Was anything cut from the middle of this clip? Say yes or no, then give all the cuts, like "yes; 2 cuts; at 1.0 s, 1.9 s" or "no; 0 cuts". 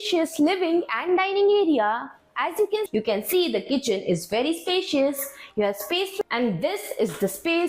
yes; 2 cuts; at 2.9 s, 6.2 s